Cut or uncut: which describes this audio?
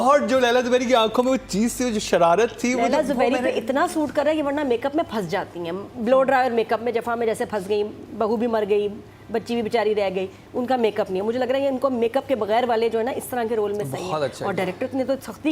uncut